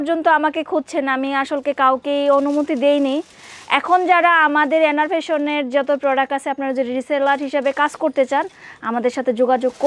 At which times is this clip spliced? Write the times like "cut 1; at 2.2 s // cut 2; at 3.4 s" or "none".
none